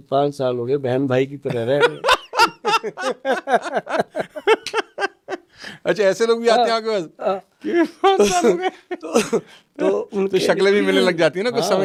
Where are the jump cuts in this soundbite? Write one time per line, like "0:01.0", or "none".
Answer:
none